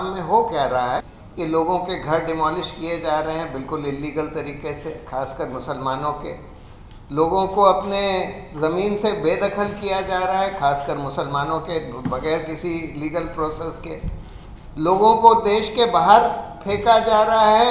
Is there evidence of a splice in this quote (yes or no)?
yes